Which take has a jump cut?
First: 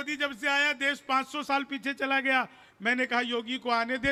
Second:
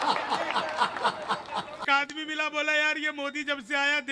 second; 1 cut; at 1.8 s

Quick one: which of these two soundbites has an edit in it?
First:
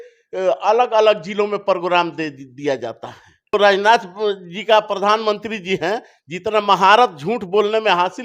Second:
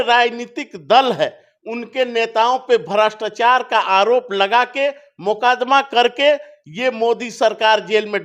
first; 1 cut; at 3.5 s

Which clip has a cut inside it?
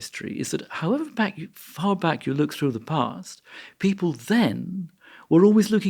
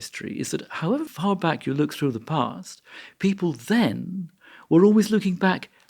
second; 1 cut; at 1.1 s

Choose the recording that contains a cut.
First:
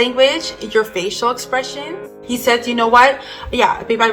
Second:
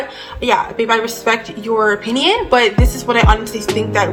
first; 1 cut; at 2.1 s

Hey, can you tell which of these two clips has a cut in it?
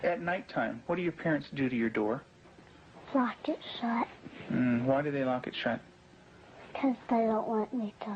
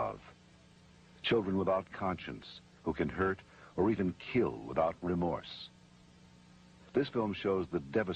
first; 1 cut; at 5.9 s

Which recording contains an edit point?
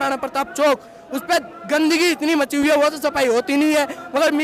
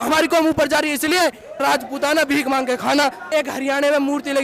second; 2 cuts; at 1.6 s, 3.3 s

